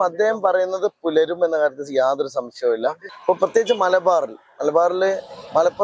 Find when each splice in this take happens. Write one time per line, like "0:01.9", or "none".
0:03.1